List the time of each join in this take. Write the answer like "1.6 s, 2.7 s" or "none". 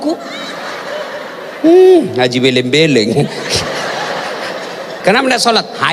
5.0 s